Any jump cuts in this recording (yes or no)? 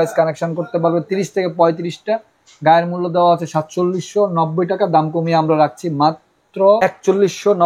no